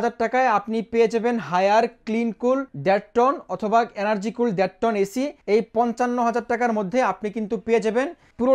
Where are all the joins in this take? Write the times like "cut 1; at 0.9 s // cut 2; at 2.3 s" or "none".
cut 1; at 2.7 s // cut 2; at 5.4 s